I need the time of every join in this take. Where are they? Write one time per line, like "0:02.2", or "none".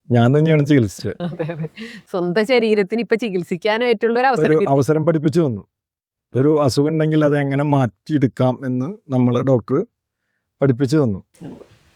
none